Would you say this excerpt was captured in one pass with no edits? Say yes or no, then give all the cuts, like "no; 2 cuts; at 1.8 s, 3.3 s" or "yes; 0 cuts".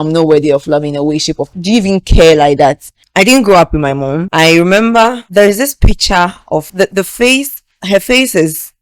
no; 5 cuts; at 1.4 s, 3.0 s, 4.2 s, 5.2 s, 6.7 s